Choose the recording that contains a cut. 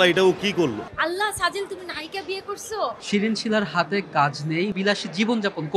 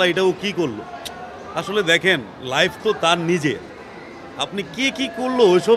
first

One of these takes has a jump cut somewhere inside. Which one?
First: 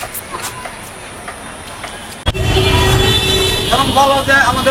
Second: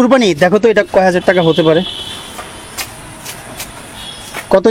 first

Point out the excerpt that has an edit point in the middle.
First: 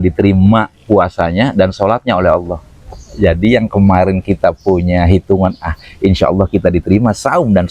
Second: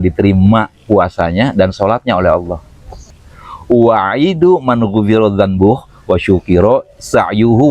second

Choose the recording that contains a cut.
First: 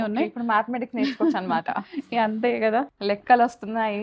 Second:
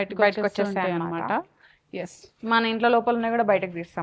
first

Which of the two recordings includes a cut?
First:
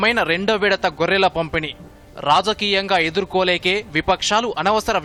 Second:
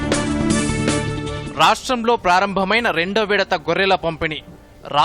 second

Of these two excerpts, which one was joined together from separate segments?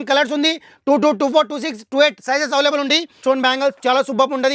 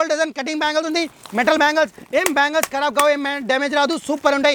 first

